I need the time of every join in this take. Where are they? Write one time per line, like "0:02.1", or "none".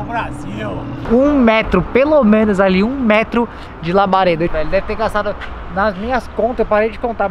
0:00.9
0:04.5